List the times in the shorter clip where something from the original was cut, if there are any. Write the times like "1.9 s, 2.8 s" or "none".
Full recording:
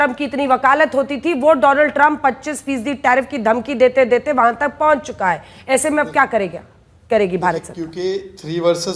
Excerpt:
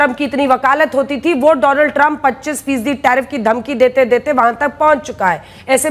none